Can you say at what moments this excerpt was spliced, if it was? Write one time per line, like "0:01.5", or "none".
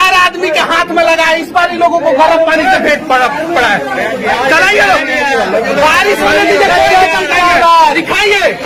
none